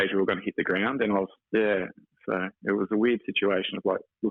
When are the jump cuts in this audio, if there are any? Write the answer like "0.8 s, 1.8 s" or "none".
none